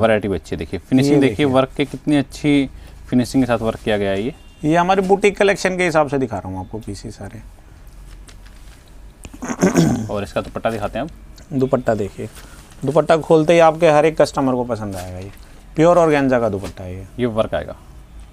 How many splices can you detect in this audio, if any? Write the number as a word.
zero